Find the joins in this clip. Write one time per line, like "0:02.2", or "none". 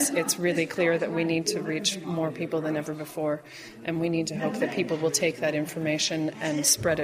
none